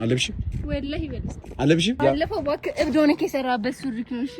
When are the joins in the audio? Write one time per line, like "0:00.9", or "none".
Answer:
0:02.0

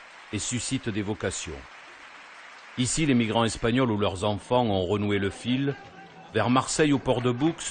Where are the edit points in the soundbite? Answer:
0:05.2

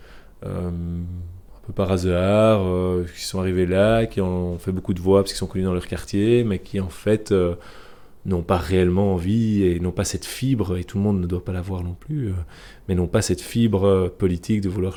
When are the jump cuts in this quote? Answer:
none

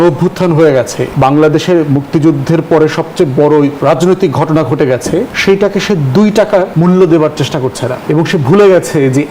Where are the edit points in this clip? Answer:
0:01.0
0:03.8
0:05.3
0:06.7
0:07.9

